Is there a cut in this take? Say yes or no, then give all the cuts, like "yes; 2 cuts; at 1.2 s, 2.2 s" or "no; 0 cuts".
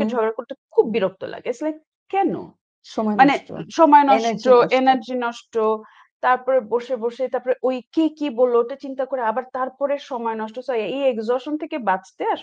no; 0 cuts